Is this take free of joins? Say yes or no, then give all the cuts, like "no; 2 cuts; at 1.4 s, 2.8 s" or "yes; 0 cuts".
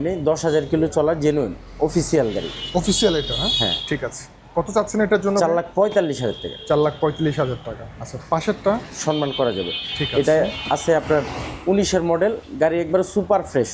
yes; 0 cuts